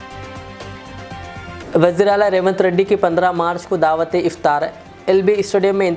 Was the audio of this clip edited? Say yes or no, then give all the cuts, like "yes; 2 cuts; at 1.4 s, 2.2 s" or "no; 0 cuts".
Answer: no; 0 cuts